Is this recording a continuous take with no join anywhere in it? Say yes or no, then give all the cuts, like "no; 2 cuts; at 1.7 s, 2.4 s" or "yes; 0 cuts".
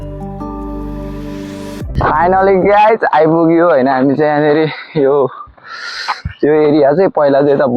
no; 1 cut; at 1.9 s